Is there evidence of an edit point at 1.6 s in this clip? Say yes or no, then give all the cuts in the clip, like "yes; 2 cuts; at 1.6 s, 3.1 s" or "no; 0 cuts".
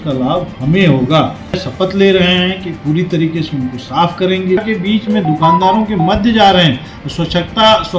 yes; 2 cuts; at 1.6 s, 4.6 s